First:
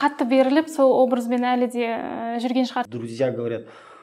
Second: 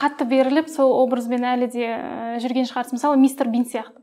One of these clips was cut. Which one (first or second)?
first